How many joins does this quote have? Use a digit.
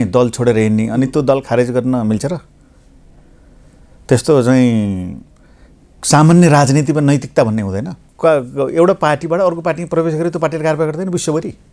1